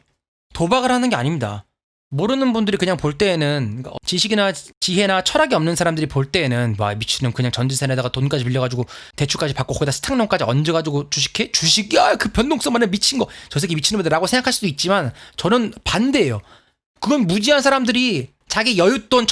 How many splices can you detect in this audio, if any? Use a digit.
2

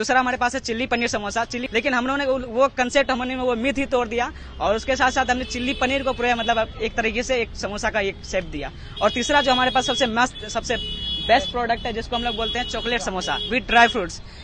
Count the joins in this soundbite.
1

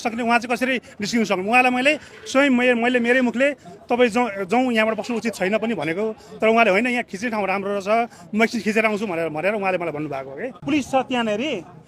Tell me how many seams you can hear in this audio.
1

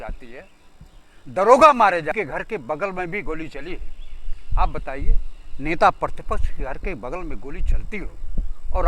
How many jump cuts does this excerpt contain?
1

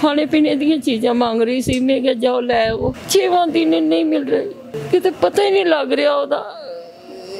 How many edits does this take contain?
2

